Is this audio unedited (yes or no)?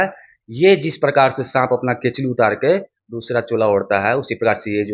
yes